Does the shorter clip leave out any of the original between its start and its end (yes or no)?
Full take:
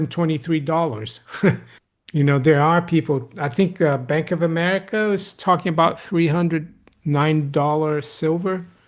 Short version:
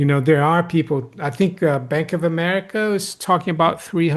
no